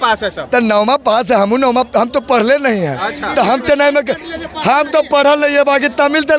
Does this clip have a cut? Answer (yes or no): no